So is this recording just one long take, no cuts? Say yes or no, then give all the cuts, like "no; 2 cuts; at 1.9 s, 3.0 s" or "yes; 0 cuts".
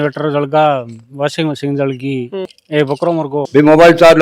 no; 1 cut; at 2.8 s